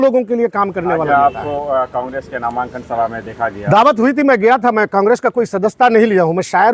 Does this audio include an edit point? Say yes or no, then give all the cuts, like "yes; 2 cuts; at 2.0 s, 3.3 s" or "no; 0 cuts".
yes; 1 cut; at 1.1 s